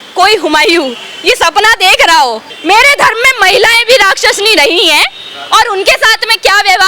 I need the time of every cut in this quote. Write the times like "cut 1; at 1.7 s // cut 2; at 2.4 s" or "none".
cut 1; at 2.5 s